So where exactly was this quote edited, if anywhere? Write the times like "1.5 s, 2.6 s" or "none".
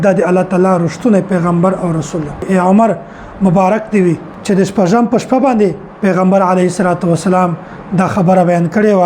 2.4 s, 4.3 s